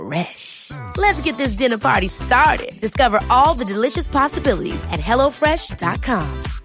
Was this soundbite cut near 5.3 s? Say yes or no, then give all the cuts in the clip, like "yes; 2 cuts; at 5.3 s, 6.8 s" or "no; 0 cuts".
no; 0 cuts